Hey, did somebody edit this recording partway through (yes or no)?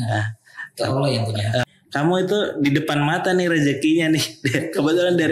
yes